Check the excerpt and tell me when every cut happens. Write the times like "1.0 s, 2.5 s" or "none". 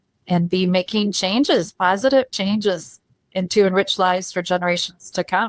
none